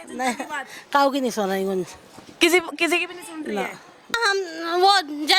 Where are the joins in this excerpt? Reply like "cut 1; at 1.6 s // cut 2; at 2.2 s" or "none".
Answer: cut 1; at 4.1 s